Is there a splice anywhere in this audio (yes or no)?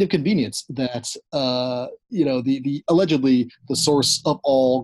no